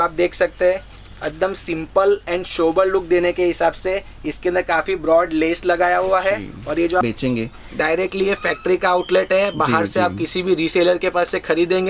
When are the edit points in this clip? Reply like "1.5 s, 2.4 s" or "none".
7.0 s